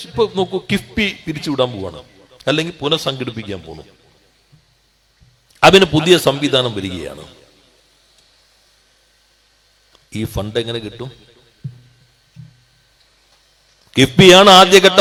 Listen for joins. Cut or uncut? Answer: uncut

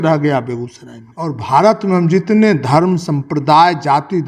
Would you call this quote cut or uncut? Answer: cut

